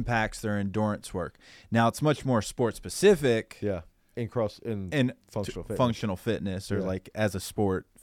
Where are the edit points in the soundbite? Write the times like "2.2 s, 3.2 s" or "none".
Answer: none